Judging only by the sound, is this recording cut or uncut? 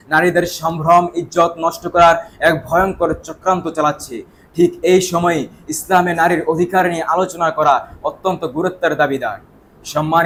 uncut